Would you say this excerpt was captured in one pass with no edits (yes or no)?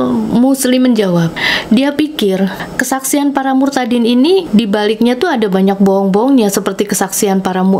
no